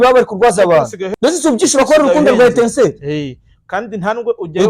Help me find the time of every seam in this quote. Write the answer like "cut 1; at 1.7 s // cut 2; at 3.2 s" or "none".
cut 1; at 1.0 s